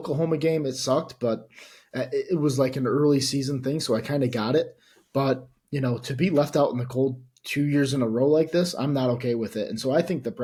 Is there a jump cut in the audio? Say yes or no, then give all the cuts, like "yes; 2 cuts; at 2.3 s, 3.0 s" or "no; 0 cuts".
no; 0 cuts